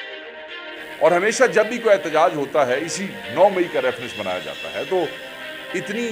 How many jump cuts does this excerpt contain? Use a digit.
1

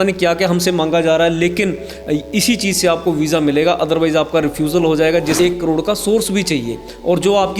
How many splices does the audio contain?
1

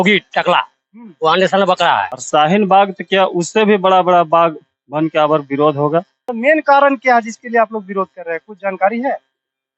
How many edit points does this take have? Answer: 2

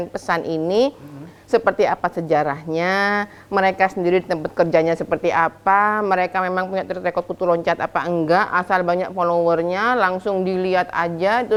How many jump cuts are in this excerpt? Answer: 0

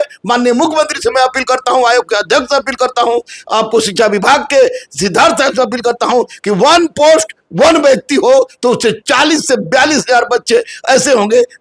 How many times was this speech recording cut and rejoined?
0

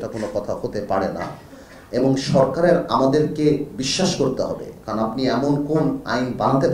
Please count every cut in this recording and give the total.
0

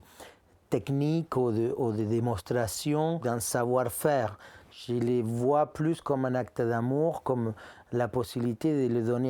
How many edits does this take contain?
1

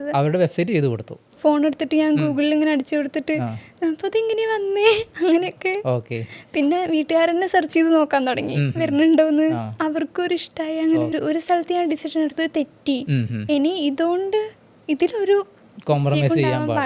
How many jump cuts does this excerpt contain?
2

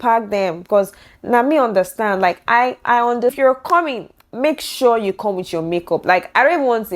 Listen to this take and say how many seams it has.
1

